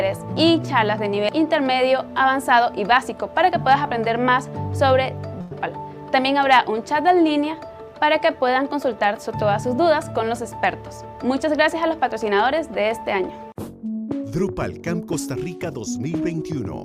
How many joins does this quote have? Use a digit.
0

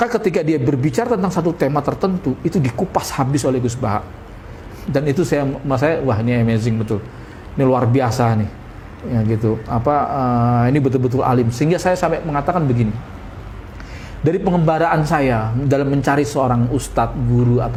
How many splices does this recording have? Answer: 0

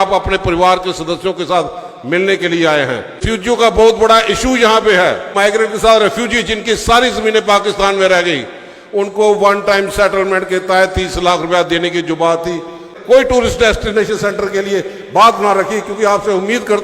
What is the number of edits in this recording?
3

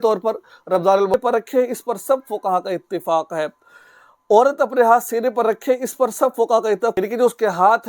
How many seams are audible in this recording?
2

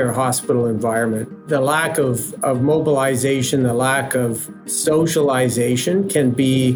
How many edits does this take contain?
2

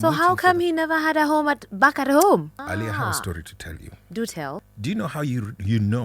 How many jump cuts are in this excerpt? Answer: 2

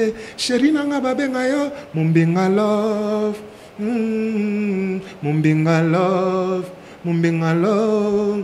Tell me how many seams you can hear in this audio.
0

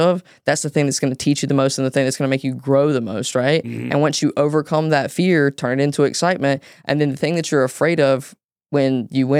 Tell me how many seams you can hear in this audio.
0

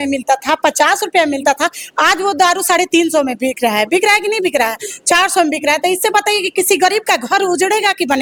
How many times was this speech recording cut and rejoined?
0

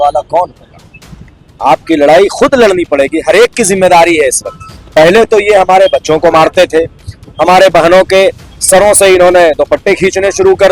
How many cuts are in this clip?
1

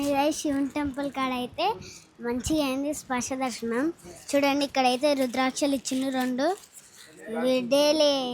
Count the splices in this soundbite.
0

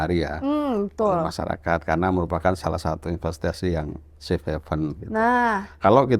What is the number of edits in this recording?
0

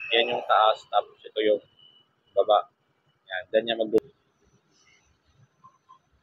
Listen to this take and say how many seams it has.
1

